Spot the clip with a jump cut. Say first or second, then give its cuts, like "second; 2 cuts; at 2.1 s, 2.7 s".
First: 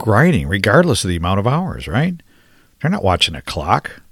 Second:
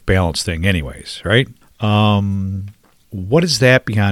second; 1 cut; at 1.6 s